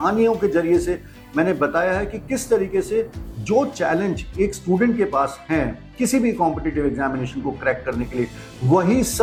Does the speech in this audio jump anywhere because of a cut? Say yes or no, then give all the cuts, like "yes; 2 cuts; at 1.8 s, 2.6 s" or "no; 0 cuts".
no; 0 cuts